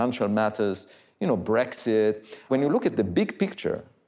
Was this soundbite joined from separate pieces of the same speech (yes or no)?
yes